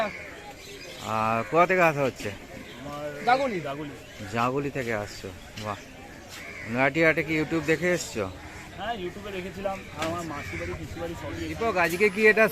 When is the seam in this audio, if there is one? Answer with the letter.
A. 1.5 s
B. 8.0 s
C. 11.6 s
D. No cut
C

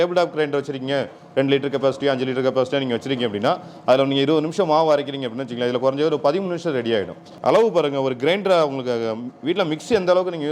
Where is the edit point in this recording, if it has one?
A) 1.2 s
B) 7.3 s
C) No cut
B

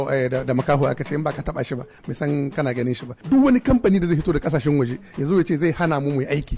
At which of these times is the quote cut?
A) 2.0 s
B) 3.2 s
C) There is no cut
B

